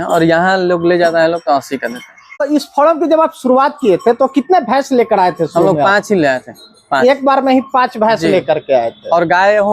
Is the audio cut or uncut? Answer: cut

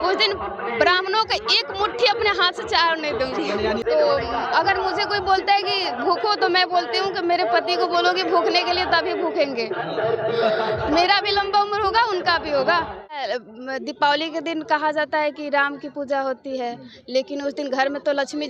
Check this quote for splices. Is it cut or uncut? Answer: cut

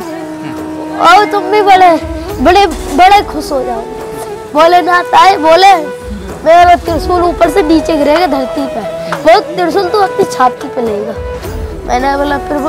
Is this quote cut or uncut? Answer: uncut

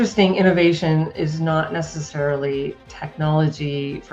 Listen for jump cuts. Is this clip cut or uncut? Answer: uncut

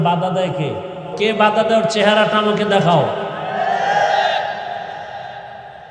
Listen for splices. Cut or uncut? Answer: cut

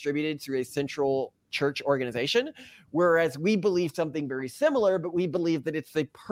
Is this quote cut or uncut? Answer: uncut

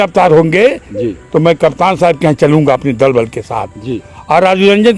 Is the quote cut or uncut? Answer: uncut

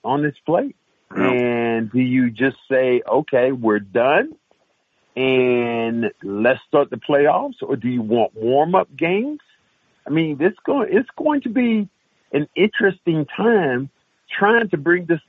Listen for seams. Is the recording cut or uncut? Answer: uncut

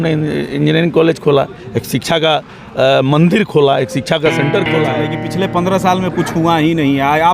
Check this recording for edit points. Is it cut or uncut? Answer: cut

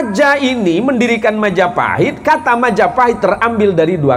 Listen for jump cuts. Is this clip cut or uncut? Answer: uncut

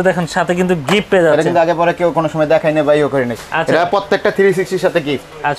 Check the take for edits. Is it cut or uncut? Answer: uncut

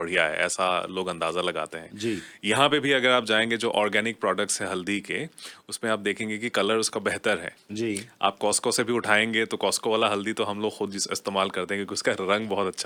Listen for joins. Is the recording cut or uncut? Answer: uncut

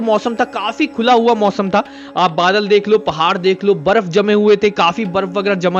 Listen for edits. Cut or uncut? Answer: uncut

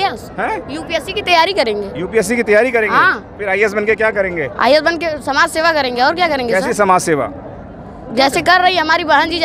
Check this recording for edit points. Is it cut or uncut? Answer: uncut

